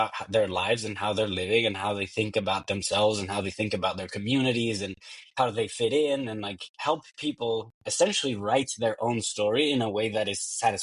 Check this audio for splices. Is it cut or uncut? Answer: uncut